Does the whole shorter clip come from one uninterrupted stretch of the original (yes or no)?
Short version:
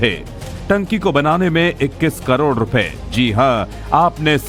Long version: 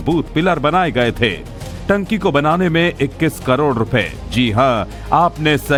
yes